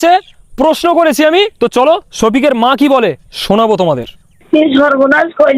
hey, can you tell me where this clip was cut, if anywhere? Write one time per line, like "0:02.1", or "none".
0:01.5
0:04.4